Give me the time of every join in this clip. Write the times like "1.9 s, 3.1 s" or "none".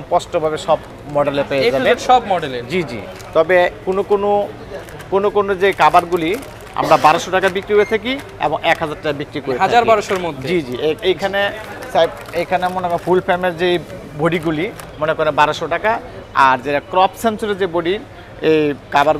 none